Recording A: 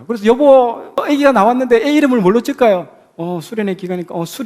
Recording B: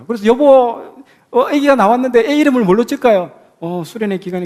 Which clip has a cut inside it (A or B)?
A